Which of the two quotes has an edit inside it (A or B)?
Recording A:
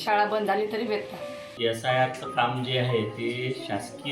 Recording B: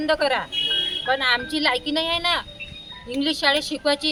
A